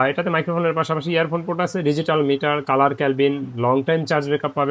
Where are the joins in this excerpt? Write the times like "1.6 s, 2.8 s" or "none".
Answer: none